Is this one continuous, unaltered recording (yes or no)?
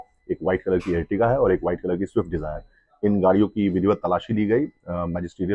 yes